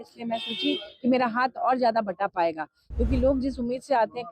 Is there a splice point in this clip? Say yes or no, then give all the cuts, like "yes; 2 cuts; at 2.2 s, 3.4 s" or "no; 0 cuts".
no; 0 cuts